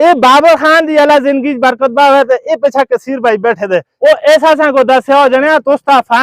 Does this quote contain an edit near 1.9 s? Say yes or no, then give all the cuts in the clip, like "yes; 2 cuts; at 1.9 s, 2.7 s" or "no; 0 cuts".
no; 1 cut; at 3.9 s